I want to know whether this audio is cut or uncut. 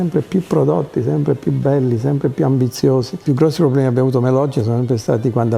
cut